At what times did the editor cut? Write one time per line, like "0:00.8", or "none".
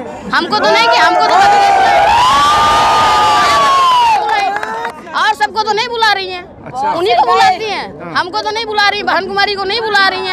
none